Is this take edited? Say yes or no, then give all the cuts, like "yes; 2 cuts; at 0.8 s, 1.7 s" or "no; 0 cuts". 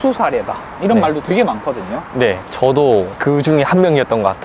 yes; 1 cut; at 2.4 s